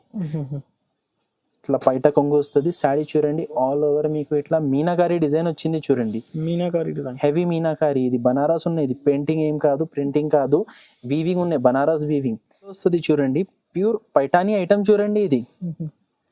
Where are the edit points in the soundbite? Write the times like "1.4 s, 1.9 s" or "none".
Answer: 12.6 s